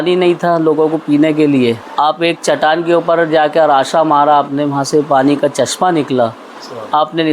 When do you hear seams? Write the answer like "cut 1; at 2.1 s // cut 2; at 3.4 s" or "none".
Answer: cut 1; at 1.9 s